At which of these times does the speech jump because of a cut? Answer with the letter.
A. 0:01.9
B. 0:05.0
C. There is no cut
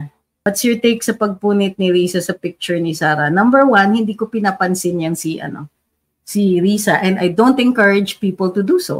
C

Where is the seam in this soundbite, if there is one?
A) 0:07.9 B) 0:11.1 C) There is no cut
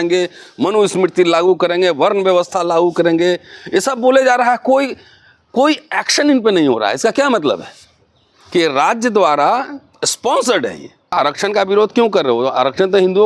B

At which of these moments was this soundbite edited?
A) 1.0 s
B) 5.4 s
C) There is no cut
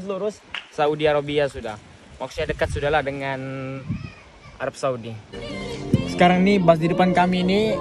B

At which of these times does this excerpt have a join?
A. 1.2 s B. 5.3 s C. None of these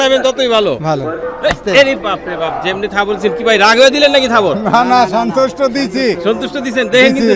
A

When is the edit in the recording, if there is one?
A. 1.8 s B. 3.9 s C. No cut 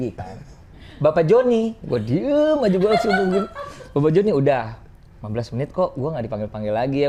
C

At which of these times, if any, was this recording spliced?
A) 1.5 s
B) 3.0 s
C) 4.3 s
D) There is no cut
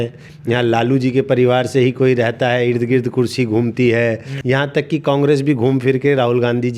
C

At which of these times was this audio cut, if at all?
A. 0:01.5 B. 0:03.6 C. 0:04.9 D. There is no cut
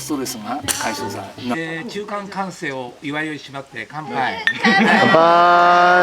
A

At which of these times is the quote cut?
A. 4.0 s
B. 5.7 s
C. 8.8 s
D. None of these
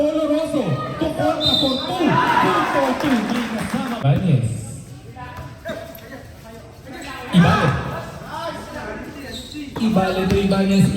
A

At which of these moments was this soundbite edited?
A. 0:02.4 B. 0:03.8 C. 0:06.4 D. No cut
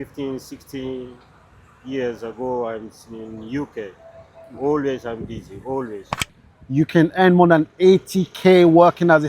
C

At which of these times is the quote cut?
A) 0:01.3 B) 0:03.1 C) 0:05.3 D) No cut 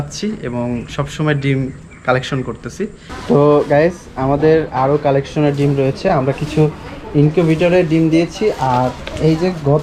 B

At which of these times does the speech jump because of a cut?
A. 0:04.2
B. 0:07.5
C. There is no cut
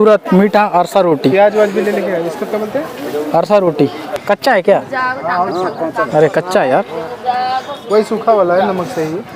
A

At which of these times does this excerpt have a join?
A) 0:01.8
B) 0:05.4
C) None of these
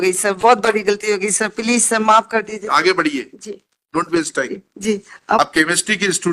B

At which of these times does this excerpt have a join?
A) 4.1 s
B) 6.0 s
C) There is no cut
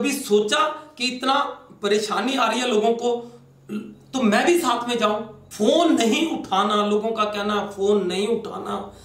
C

